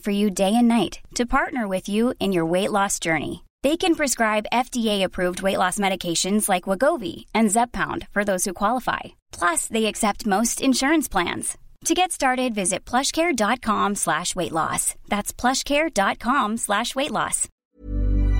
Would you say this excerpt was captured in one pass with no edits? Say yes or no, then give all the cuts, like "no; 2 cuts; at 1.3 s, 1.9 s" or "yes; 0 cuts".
no; 1 cut; at 17.5 s